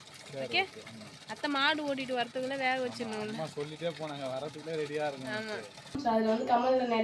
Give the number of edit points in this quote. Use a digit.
1